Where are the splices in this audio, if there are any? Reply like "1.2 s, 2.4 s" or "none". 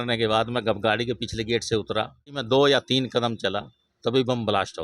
2.4 s